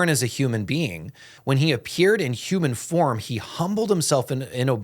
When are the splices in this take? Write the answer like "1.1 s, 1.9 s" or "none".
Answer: 1.3 s